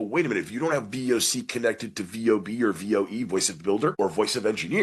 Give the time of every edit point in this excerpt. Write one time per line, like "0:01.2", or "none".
0:03.9